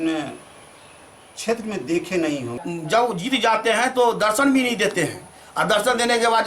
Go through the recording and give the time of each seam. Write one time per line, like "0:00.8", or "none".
0:02.5